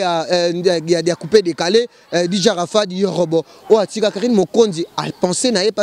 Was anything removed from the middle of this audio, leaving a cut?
no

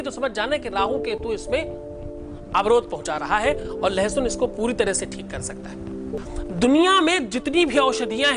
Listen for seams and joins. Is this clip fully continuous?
no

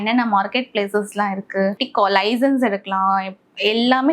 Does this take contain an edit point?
yes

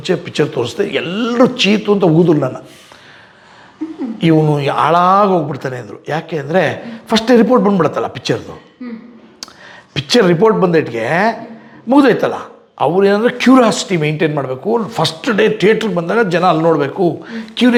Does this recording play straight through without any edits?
yes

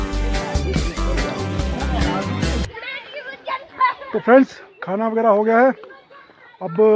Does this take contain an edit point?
yes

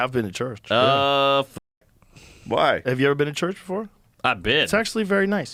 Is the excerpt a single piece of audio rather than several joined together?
yes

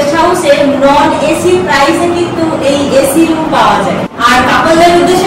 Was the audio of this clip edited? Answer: no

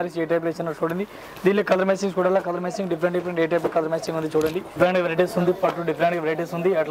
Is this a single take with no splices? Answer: no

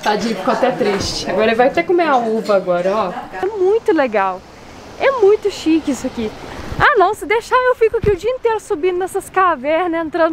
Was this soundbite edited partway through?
yes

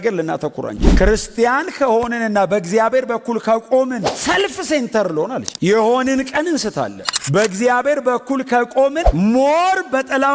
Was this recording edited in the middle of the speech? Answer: no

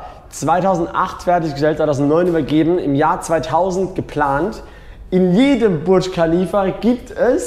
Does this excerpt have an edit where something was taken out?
no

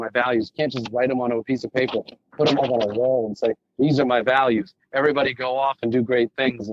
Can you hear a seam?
no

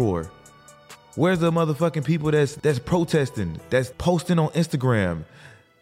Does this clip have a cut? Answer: yes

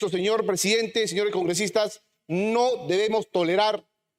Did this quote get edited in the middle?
no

